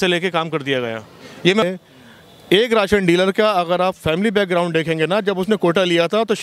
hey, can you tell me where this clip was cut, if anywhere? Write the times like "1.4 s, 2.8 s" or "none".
1.6 s